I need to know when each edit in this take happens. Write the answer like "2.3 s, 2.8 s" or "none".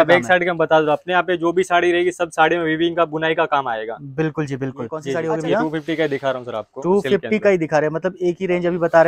5.1 s